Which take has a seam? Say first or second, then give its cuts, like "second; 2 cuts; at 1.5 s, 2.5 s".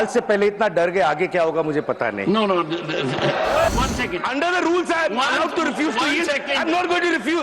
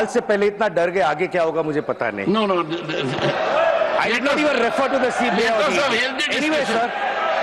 first; 1 cut; at 3.7 s